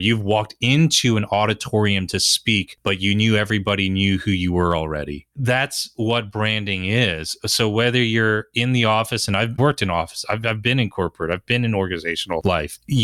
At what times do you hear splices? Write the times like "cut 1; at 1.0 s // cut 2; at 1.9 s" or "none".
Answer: cut 1; at 5.2 s